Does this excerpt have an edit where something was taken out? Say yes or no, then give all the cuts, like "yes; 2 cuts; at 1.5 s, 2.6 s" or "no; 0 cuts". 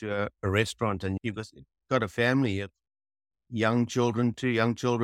no; 0 cuts